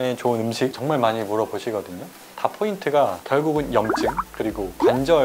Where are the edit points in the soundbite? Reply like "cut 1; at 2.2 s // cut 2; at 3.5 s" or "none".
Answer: cut 1; at 2.3 s